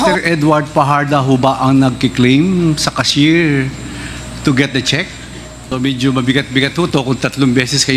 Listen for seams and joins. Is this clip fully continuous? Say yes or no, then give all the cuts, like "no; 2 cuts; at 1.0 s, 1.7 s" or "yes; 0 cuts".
no; 1 cut; at 5.6 s